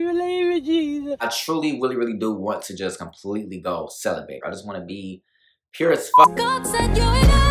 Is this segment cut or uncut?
cut